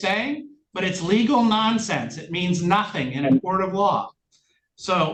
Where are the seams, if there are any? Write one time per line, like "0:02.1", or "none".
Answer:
none